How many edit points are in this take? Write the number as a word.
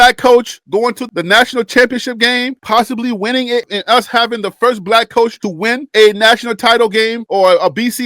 one